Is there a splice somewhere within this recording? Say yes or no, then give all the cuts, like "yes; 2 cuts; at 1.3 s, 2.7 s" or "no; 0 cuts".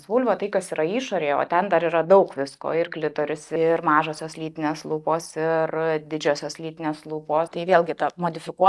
yes; 2 cuts; at 3.4 s, 7.5 s